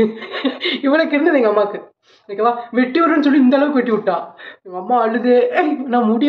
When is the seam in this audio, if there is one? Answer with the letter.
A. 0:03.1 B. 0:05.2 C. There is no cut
C